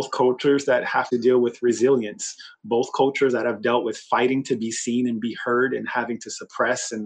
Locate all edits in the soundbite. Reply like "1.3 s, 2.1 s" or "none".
1.1 s